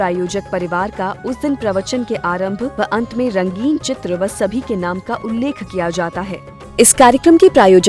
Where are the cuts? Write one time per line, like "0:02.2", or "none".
0:06.4